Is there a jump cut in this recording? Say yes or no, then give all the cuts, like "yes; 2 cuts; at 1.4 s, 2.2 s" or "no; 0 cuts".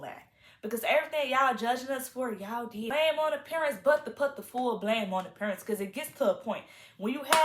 yes; 1 cut; at 2.9 s